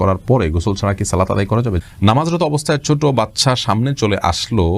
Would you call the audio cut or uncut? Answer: cut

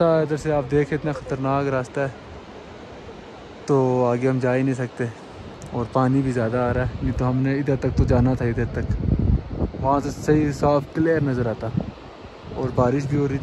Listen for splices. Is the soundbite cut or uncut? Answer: uncut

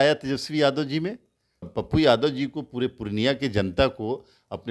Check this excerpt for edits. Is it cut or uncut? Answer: cut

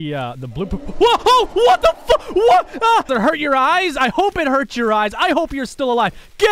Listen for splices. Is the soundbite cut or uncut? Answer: cut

